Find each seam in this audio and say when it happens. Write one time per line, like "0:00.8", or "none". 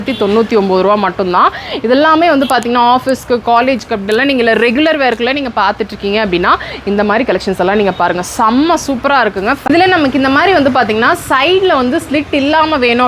0:09.7